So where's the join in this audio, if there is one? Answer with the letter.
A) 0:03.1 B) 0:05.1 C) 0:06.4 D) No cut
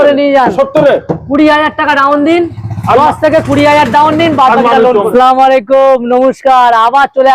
B